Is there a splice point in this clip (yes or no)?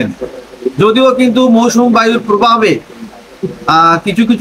no